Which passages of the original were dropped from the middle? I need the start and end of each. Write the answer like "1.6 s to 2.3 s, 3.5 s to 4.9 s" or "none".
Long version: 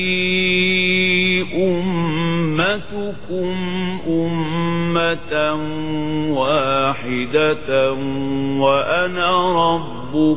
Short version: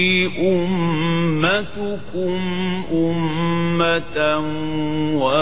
none